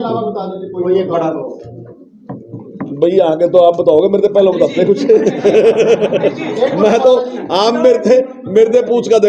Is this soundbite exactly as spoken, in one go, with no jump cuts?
yes; 0 cuts

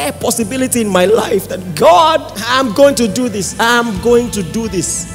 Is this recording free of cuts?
no; 1 cut; at 2.4 s

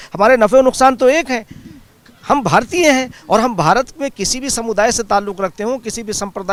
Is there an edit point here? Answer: no; 0 cuts

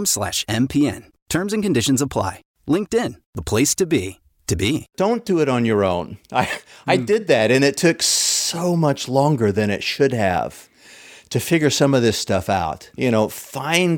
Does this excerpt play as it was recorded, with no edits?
no; 2 cuts; at 4.9 s, 12.9 s

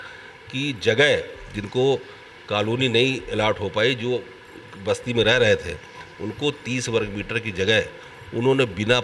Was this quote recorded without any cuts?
yes; 0 cuts

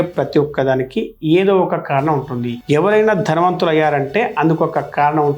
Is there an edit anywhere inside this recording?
no; 0 cuts

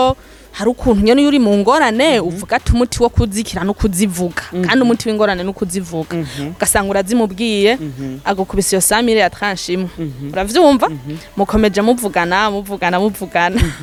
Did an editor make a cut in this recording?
no; 0 cuts

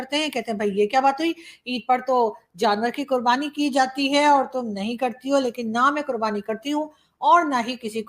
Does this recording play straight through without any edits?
yes; 0 cuts

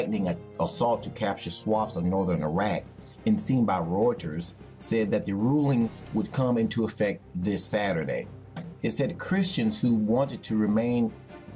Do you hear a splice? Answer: yes; 1 cut; at 5.5 s

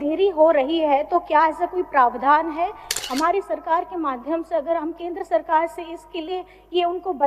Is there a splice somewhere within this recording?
yes; 1 cut; at 2.9 s

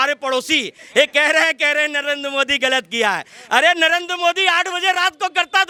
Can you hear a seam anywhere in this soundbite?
no; 0 cuts

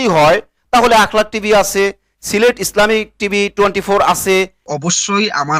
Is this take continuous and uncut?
no; 1 cut; at 4.7 s

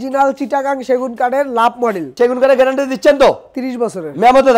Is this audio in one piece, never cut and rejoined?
no; 1 cut; at 2.1 s

